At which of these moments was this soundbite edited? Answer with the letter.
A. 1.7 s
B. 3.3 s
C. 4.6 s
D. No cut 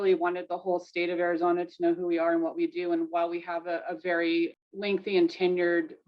C